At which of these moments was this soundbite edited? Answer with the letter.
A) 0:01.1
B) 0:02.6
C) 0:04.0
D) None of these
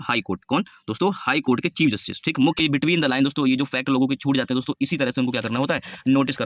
B